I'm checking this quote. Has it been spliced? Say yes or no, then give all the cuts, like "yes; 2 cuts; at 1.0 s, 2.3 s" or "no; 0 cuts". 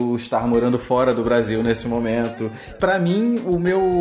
no; 0 cuts